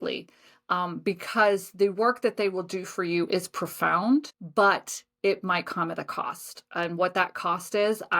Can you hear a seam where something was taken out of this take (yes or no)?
yes